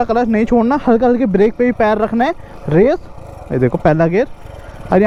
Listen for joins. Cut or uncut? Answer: uncut